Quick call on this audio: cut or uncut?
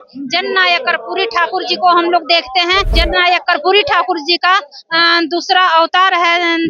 cut